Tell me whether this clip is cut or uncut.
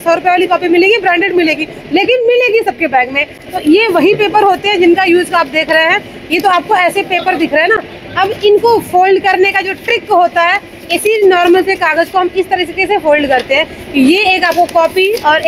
uncut